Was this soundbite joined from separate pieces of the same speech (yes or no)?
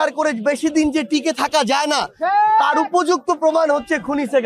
no